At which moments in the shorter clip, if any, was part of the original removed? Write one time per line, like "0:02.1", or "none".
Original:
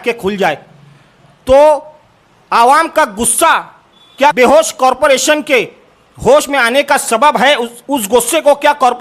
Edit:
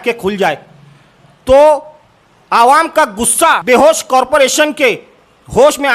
0:03.6